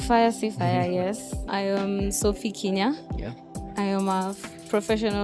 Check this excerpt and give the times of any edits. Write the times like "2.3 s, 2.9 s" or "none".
1.3 s